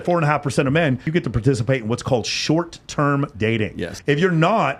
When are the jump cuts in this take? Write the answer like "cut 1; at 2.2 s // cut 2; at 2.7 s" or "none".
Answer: cut 1; at 1.1 s // cut 2; at 3.9 s